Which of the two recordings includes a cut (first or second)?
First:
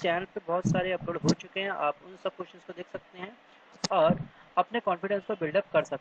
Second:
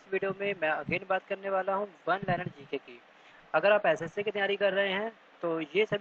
first